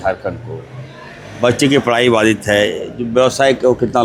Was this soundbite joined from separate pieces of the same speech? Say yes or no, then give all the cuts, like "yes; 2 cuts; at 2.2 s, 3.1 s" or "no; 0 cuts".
no; 0 cuts